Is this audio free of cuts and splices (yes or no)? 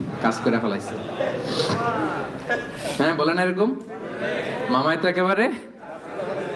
yes